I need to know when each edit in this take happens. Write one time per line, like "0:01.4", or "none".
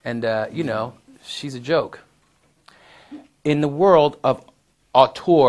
0:04.2

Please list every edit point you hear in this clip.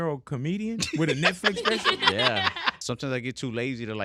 0:02.7

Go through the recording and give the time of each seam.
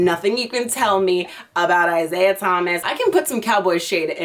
0:02.8

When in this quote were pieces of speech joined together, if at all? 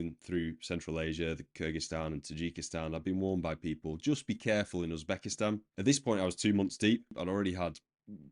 0:05.7
0:07.2

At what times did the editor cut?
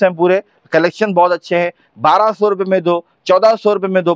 none

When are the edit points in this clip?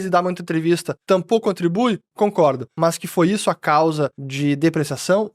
0:00.9
0:02.7
0:04.2

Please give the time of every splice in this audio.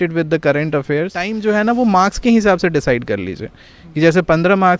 0:01.3

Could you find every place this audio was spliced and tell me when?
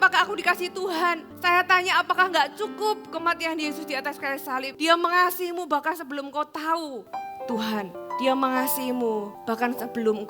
0:01.3
0:04.7
0:07.0
0:08.0
0:09.3

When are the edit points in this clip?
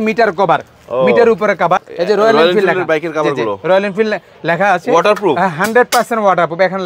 0:01.8

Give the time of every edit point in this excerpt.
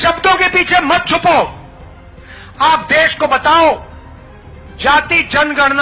none

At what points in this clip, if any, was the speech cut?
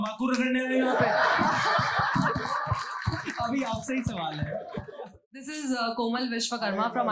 0:04.9

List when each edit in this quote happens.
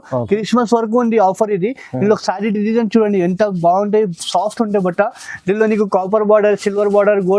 none

